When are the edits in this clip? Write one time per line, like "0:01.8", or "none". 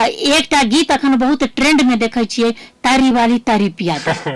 none